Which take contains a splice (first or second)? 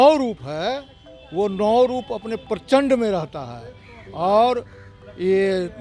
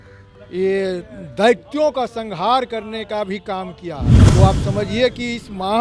second